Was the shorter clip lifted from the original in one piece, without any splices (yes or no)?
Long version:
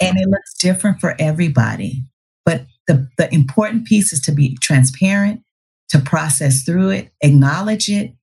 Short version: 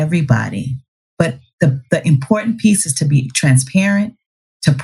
yes